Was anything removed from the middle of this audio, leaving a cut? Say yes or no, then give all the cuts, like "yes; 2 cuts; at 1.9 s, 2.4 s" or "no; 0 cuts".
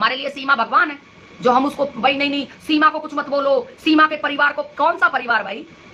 no; 0 cuts